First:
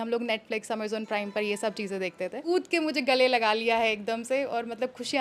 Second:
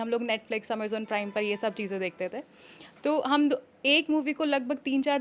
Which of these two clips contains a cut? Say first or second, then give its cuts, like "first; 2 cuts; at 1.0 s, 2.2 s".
first; 1 cut; at 2.4 s